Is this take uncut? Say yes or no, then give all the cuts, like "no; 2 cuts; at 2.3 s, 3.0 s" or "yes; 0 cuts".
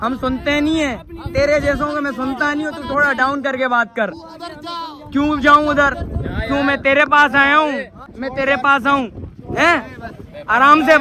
yes; 0 cuts